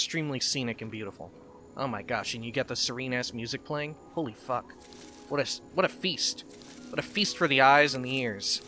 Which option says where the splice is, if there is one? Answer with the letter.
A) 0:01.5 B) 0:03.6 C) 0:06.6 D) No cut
D